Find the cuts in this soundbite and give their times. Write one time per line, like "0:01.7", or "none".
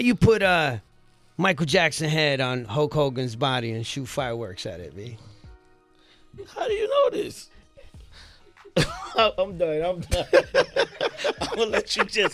none